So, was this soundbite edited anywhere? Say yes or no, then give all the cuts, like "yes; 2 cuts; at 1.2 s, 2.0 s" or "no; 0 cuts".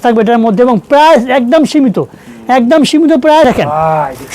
yes; 1 cut; at 3.4 s